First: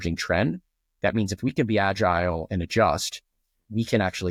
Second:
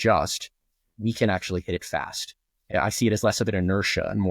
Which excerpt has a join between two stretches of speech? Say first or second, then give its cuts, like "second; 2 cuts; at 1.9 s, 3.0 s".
second; 1 cut; at 2.7 s